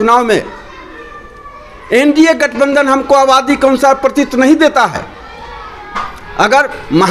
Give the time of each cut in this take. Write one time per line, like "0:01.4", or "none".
none